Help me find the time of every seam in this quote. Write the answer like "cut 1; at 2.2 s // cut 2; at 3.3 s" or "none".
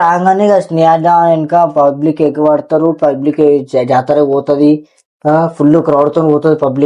none